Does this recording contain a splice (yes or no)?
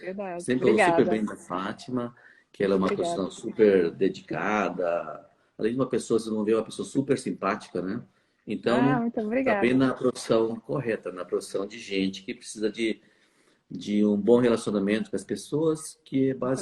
no